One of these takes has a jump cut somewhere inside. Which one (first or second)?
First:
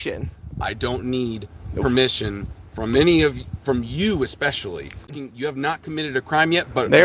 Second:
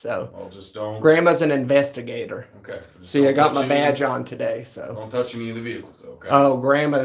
first